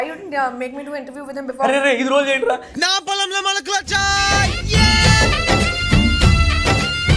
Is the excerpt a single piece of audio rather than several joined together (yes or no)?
yes